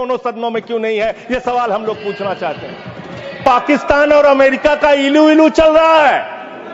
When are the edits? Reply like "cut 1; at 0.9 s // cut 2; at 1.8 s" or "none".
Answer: cut 1; at 3.4 s